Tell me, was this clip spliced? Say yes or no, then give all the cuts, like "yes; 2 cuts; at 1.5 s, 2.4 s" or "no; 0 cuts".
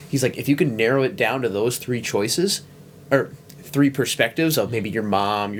no; 0 cuts